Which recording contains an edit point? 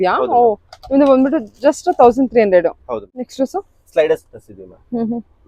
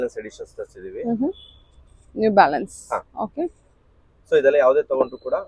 first; 1 cut; at 3.1 s

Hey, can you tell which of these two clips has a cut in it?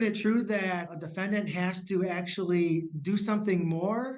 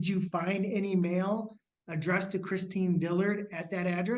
first; 1 cut; at 1.0 s

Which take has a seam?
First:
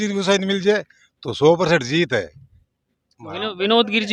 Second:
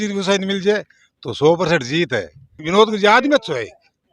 second; 1 cut; at 2.6 s

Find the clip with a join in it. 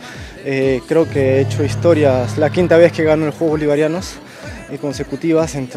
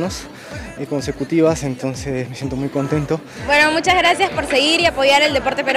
second; 1 cut; at 3.3 s

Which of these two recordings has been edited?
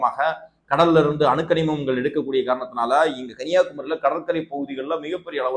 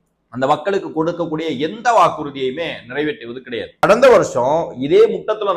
second; 1 cut; at 3.8 s

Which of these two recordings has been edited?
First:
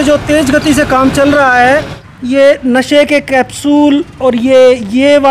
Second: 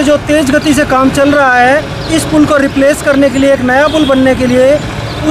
first; 1 cut; at 2.0 s

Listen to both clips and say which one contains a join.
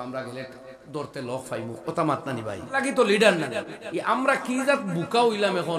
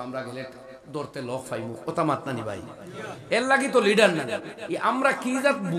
first; 1 cut; at 2.7 s

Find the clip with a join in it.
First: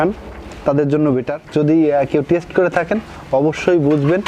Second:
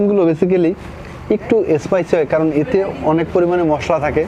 first; 1 cut; at 1.3 s

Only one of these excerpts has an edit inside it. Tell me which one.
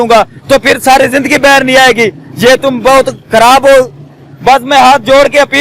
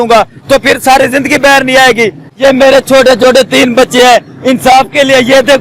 second; 1 cut; at 2.3 s

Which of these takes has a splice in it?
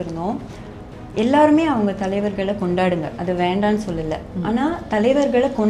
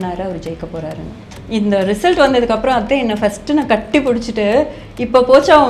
second; 1 cut; at 1.3 s

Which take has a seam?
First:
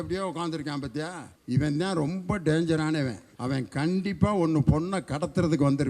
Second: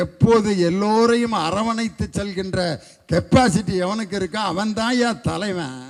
first; 2 cuts; at 1.3 s, 3.3 s

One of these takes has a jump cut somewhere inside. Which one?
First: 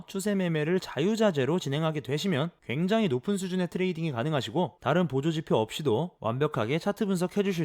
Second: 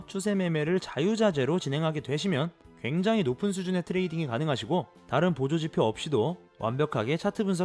first; 3 cuts; at 2.6 s, 4.8 s, 6.1 s

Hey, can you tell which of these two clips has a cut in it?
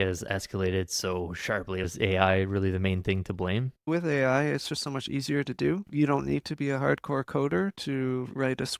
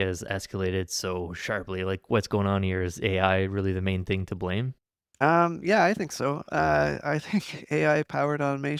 first; 3 cuts; at 1.9 s, 3.9 s, 5.9 s

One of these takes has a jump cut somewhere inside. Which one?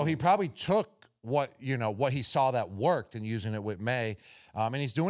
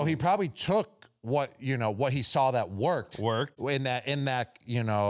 first; 1 cut; at 3.1 s

